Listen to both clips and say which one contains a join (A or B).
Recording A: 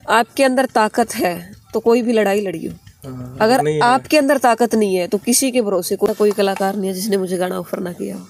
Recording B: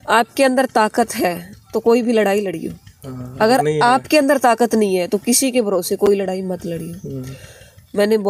A